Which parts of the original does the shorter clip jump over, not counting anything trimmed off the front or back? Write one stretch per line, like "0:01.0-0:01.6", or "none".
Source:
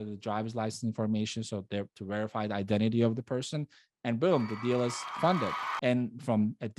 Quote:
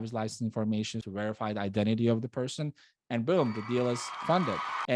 0:01.4-0:02.0